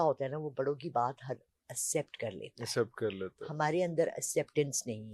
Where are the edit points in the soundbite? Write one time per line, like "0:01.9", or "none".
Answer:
none